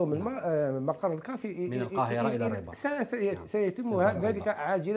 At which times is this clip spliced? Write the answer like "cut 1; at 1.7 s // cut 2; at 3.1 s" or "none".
none